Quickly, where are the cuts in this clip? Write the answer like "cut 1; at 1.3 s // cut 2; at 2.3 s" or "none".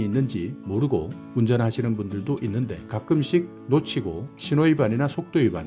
cut 1; at 2.8 s // cut 2; at 3.6 s